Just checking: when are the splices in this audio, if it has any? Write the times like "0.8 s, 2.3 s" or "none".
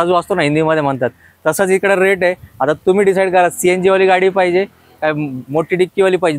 none